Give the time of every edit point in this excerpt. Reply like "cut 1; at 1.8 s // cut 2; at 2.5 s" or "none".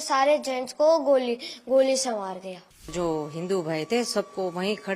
cut 1; at 2.9 s